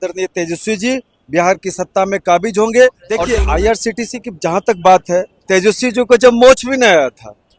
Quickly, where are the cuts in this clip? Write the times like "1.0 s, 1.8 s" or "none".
3.1 s